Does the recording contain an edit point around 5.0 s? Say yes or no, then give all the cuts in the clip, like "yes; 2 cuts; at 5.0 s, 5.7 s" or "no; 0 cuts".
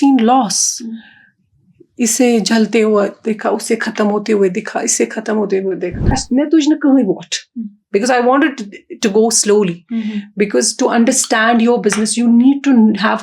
no; 1 cut; at 6.2 s